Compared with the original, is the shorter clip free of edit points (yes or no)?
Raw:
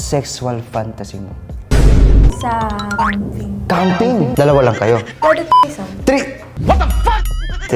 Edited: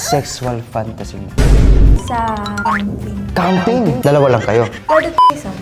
no